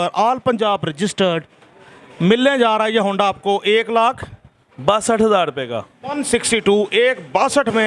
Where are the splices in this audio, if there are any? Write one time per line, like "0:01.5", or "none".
none

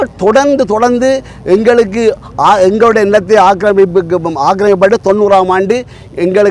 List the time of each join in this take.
none

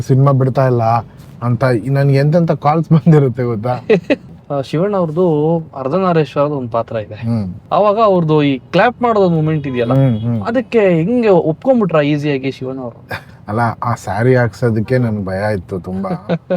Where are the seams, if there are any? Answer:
0:04.3
0:07.6
0:13.1

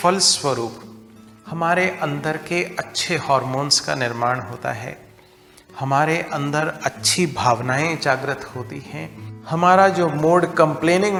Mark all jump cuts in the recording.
none

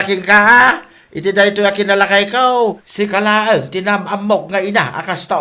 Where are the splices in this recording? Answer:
0:02.8

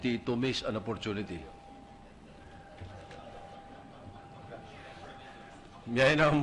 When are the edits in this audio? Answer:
0:02.2

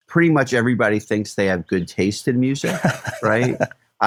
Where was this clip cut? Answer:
none

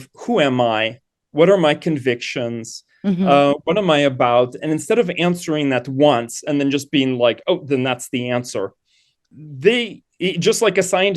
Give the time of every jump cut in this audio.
none

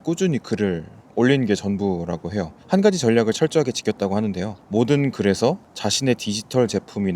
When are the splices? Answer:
0:02.5
0:04.5
0:05.7

